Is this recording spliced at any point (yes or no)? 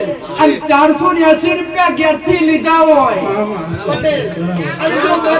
no